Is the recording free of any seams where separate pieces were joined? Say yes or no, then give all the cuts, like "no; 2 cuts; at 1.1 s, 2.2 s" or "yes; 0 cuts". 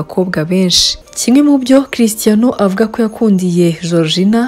no; 1 cut; at 0.9 s